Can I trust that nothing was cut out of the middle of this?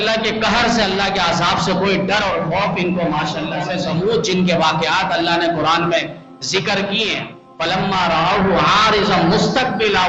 no; 1 cut; at 3.6 s

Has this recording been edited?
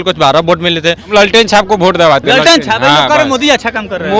yes; 1 cut; at 1.0 s

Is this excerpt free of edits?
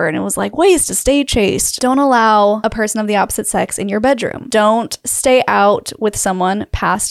no; 3 cuts; at 1.7 s, 2.6 s, 4.4 s

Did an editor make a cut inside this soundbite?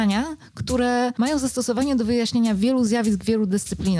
yes; 1 cut; at 1.1 s

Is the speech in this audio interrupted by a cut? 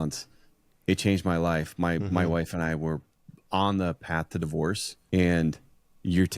yes; 1 cut; at 4.9 s

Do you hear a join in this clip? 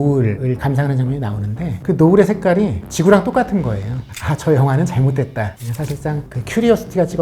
yes; 2 cuts; at 4.1 s, 5.6 s

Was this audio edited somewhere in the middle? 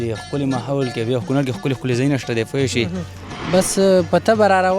yes; 1 cut; at 3.4 s

